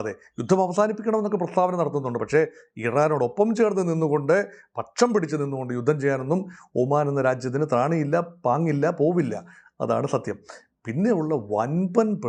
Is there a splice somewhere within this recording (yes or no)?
no